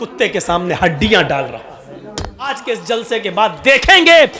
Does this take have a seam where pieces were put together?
yes; 1 cut; at 2.5 s

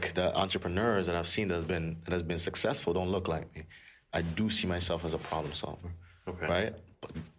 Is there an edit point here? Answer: yes; 1 cut; at 4.1 s

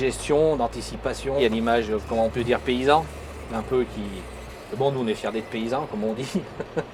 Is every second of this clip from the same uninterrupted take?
yes; 0 cuts

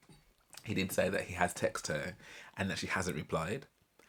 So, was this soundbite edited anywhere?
no; 0 cuts

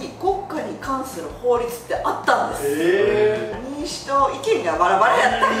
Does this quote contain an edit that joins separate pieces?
yes; 1 cut; at 3.5 s

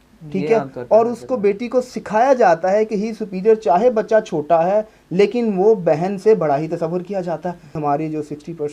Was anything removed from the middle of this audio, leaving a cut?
yes; 1 cut; at 7.8 s

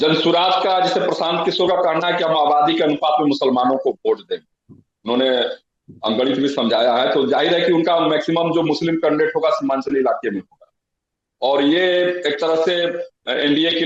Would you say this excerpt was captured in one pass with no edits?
yes; 0 cuts

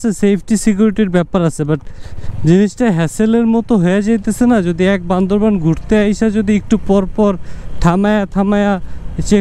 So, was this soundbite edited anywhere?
no; 0 cuts

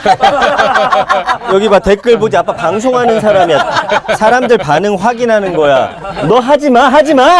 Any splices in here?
no; 0 cuts

